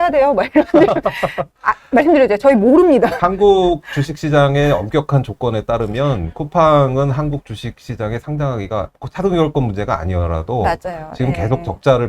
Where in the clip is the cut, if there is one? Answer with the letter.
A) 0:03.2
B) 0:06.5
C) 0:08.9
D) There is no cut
A